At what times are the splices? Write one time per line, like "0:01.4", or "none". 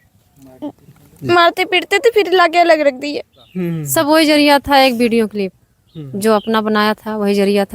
0:03.8